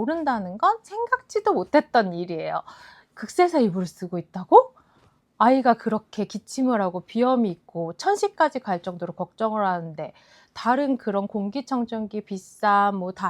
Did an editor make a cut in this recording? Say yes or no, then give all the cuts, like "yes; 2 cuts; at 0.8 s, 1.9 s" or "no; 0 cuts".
no; 0 cuts